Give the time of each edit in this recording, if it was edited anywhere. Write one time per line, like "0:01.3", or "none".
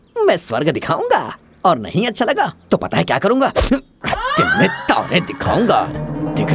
none